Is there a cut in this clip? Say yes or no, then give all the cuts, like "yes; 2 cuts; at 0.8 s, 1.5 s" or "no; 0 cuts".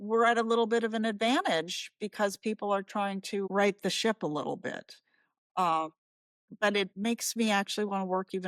yes; 2 cuts; at 3.5 s, 6.9 s